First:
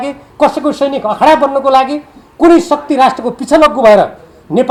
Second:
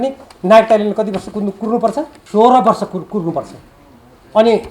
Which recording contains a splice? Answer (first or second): second